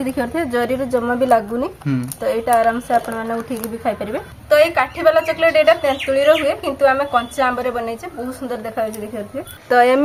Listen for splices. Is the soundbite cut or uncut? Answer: uncut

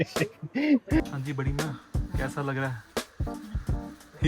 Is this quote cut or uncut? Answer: cut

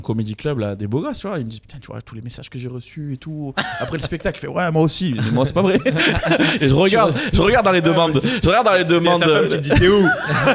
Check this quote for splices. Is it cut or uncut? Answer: uncut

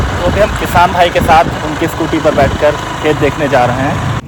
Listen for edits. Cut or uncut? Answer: uncut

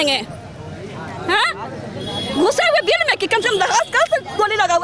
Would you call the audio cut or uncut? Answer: uncut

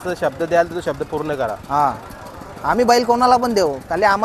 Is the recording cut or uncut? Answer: uncut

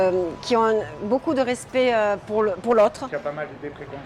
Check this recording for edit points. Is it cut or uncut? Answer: cut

